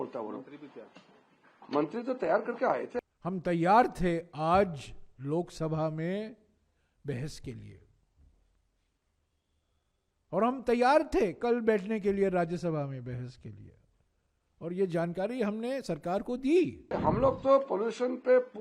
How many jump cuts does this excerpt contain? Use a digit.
2